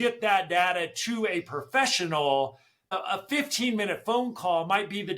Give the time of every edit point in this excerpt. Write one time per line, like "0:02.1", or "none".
0:02.9